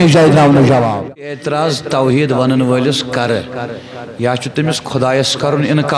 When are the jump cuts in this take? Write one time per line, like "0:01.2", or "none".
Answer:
0:01.1